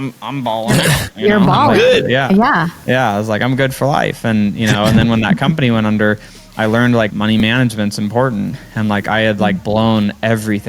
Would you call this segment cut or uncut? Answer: cut